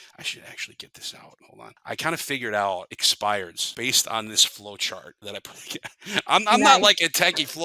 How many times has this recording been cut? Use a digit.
4